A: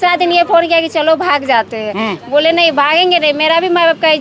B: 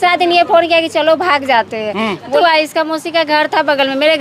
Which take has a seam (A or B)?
B